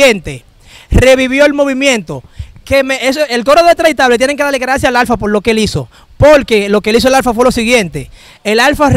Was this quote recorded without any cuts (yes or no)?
yes